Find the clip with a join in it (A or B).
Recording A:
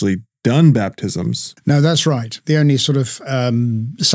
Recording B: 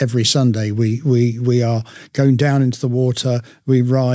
A